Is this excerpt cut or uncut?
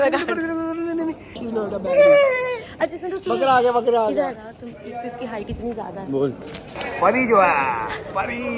cut